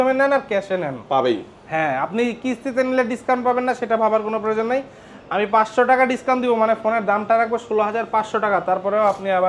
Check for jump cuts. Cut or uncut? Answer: uncut